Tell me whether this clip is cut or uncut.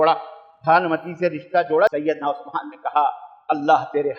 cut